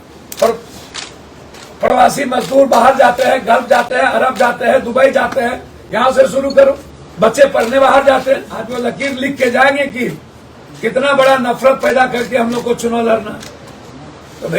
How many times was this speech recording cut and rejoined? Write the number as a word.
one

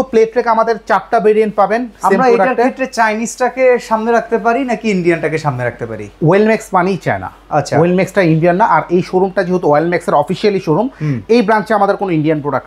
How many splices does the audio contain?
zero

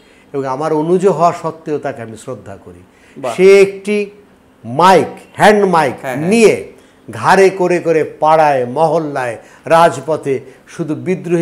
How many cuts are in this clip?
zero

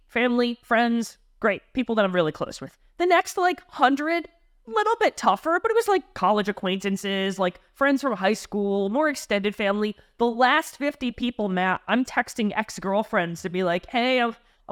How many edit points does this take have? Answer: zero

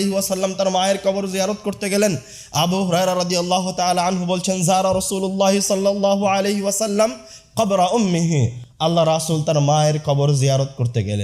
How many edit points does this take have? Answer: zero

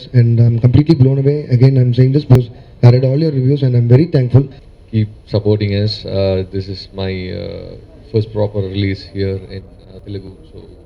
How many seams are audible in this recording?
one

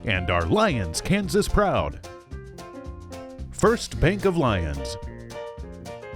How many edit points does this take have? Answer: three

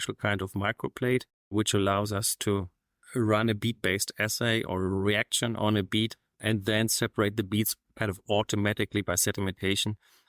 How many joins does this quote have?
zero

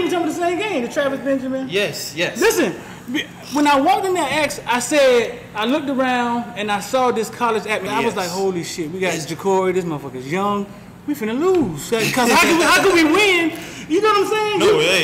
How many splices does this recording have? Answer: one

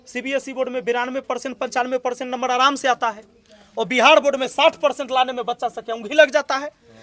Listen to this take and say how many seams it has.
zero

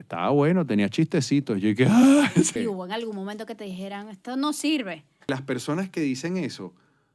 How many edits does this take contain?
two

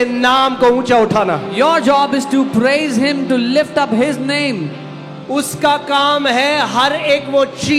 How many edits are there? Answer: zero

